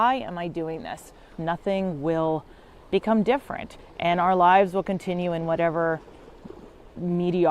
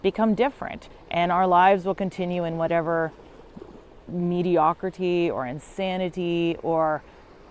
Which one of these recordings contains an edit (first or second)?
first